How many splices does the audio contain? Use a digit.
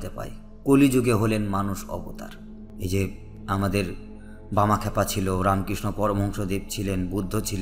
1